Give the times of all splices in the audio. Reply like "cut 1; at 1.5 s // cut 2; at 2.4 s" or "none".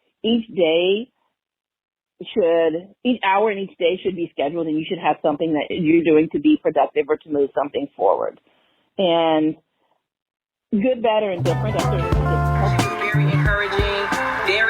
cut 1; at 11.9 s